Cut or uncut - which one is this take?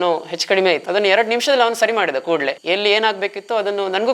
cut